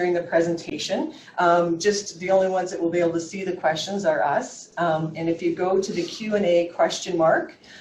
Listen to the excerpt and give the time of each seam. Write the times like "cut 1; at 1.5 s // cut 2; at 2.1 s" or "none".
cut 1; at 5.8 s

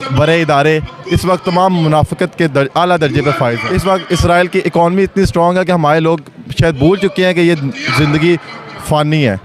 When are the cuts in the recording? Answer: cut 1; at 3.6 s

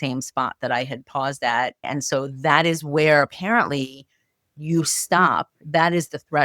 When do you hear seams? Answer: cut 1; at 1.8 s

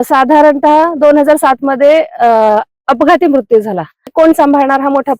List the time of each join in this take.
cut 1; at 4.1 s

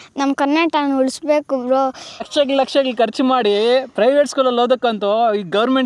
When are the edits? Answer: cut 1; at 2.3 s

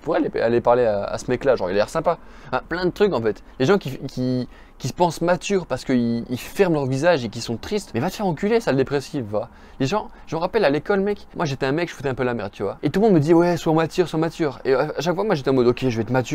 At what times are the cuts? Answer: none

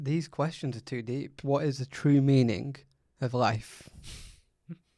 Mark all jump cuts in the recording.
cut 1; at 1.3 s // cut 2; at 4.0 s

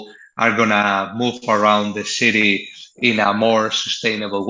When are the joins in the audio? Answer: none

